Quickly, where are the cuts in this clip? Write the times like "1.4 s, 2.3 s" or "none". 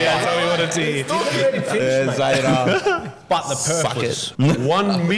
4.2 s